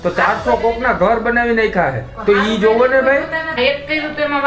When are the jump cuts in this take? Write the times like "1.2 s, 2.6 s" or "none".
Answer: 3.5 s